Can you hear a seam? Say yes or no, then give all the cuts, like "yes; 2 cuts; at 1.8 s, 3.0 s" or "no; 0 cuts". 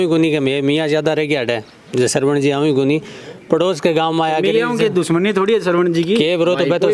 no; 0 cuts